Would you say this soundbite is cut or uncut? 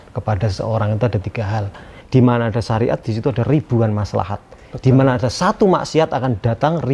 cut